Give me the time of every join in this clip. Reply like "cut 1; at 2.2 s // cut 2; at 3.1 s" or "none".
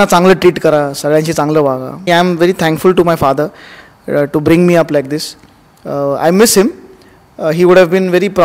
cut 1; at 2.0 s